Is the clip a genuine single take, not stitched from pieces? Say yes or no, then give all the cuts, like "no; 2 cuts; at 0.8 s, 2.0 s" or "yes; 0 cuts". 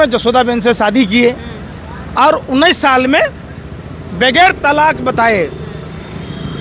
yes; 0 cuts